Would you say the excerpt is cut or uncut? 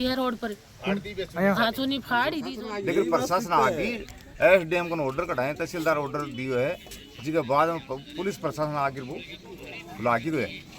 cut